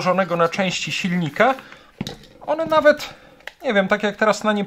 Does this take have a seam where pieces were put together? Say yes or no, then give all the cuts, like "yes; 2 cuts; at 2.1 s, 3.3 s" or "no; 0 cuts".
no; 0 cuts